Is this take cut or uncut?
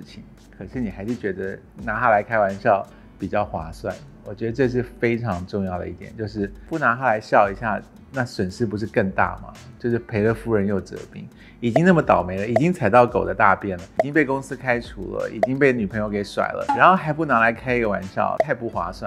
uncut